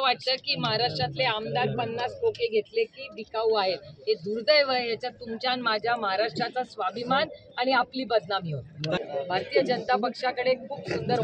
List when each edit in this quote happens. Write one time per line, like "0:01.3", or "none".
0:09.0